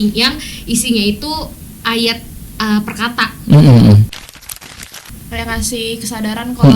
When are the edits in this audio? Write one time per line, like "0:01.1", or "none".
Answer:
0:04.7